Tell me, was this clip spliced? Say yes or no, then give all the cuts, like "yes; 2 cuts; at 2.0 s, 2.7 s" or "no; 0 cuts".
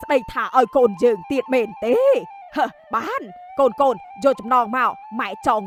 no; 0 cuts